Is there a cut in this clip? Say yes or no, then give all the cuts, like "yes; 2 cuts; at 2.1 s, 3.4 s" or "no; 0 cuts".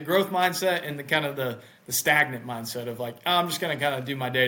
no; 0 cuts